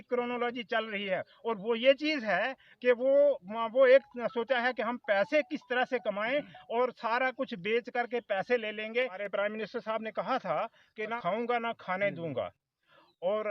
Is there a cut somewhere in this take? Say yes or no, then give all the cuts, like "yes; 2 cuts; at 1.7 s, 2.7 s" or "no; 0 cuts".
yes; 2 cuts; at 9.1 s, 11.2 s